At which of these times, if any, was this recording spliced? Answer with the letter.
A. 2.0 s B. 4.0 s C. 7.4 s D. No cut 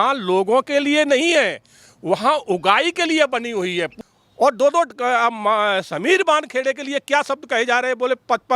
B